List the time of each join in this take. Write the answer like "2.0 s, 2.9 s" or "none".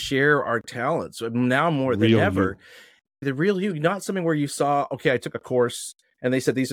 3.2 s

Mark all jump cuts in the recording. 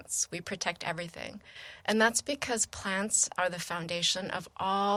none

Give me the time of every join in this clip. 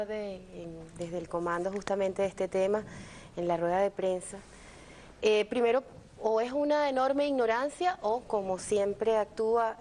3.5 s

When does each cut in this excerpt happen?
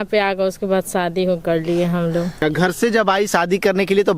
2.3 s

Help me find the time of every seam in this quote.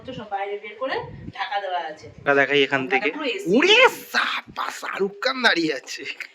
2.2 s

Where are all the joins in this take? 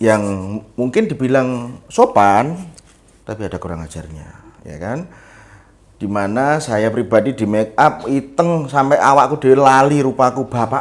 none

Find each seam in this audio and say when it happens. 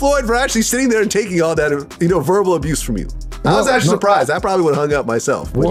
none

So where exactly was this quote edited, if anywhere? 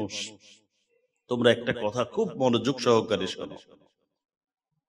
none

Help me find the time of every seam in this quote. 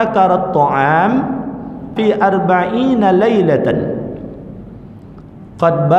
1.9 s

